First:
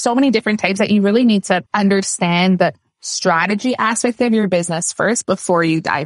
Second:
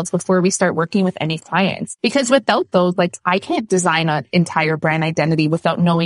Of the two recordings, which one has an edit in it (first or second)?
second